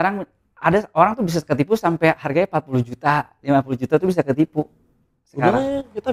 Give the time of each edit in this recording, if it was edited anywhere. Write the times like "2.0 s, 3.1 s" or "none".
none